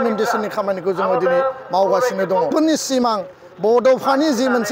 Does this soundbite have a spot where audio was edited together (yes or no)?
yes